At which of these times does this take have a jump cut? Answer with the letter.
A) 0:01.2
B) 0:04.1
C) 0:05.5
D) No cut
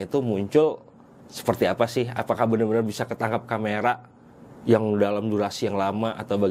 D